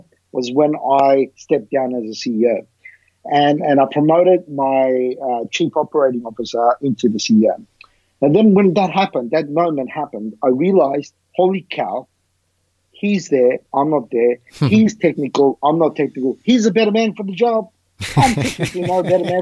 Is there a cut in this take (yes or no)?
no